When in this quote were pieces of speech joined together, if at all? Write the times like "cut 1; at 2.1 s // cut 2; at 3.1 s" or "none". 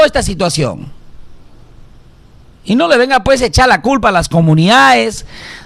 none